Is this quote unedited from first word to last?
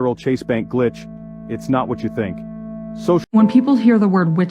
no; 1 cut; at 3.2 s

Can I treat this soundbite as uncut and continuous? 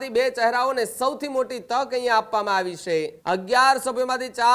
no; 1 cut; at 3.1 s

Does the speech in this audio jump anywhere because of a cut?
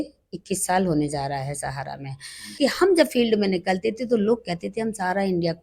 yes; 1 cut; at 2.6 s

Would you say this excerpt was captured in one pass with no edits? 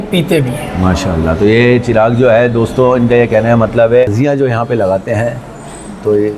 no; 1 cut; at 4.1 s

